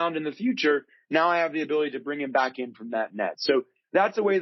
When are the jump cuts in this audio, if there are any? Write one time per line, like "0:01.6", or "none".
none